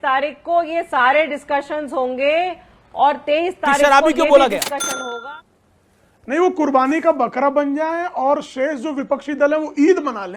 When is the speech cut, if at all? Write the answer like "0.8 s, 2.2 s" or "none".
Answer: 5.2 s